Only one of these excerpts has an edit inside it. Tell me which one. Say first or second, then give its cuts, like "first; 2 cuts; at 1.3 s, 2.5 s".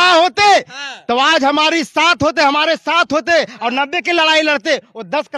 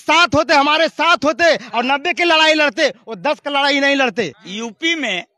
second; 1 cut; at 4.4 s